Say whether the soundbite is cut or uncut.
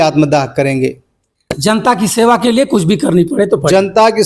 uncut